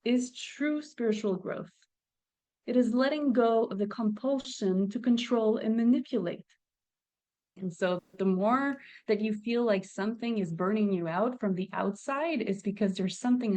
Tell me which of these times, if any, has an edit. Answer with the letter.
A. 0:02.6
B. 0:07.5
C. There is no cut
B